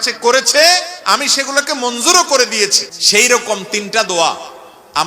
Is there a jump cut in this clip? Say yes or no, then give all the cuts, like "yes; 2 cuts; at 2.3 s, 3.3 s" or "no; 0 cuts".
yes; 1 cut; at 2.9 s